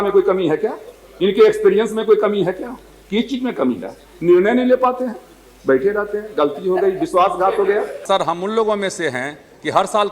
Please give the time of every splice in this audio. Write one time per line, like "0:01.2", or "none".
0:08.0